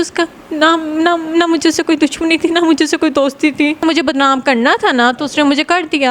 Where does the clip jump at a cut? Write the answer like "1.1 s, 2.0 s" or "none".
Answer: 3.8 s